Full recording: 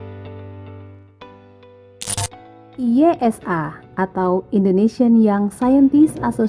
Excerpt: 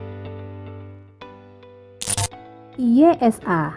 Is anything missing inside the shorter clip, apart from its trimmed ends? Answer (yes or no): no